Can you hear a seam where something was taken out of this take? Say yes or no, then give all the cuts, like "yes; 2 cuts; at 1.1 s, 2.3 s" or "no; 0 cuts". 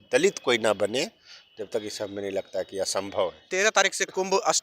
yes; 1 cut; at 3.5 s